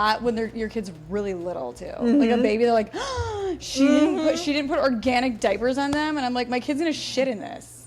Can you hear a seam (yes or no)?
no